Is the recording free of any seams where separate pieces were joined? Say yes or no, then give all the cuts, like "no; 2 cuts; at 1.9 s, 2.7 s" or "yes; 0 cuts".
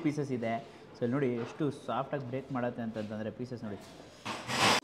yes; 0 cuts